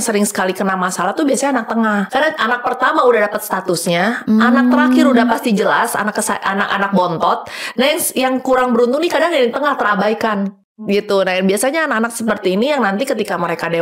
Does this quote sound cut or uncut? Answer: cut